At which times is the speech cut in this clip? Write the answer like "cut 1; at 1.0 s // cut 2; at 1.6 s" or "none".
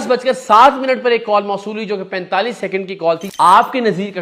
cut 1; at 3.3 s